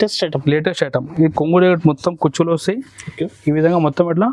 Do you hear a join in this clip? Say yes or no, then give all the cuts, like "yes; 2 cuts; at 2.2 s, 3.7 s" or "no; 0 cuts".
no; 0 cuts